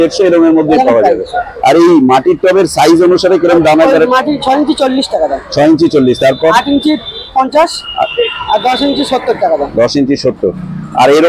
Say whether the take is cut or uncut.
uncut